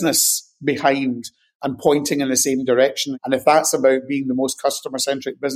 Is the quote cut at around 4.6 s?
no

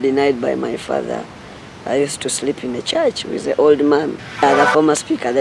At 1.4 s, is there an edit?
no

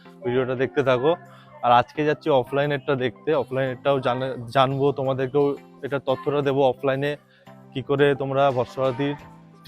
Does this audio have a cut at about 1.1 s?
yes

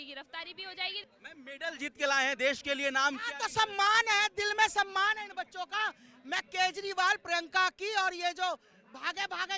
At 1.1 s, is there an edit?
yes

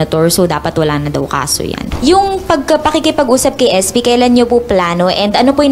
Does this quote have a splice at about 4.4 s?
no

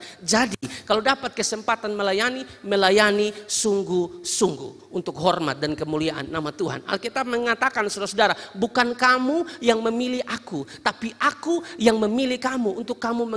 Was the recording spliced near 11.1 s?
no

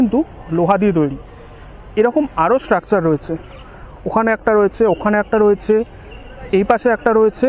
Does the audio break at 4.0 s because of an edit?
no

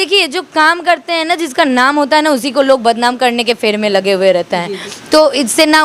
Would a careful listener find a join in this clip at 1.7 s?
no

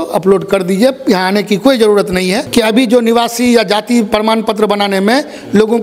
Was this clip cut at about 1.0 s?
no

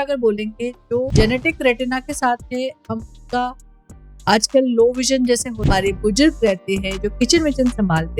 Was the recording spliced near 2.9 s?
no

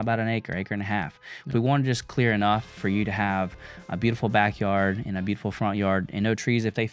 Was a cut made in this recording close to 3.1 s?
no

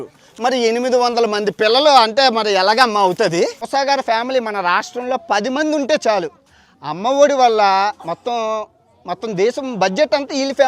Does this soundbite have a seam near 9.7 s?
no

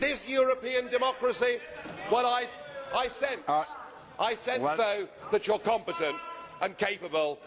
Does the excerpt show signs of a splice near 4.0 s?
no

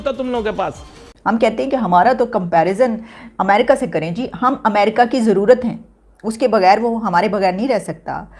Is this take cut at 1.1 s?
yes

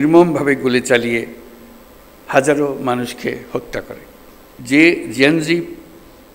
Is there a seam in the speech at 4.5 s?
yes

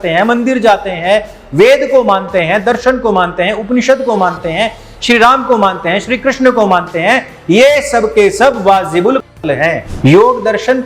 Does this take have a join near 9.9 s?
yes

